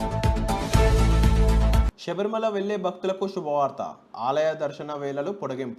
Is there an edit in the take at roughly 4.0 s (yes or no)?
no